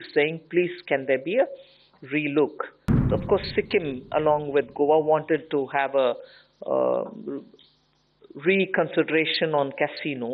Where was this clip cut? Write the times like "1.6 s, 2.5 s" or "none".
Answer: 3.0 s